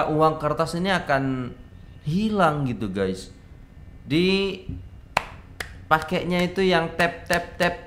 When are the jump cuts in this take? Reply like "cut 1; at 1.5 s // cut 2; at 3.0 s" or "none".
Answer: none